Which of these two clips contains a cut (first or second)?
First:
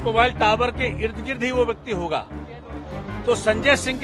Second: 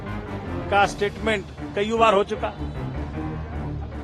second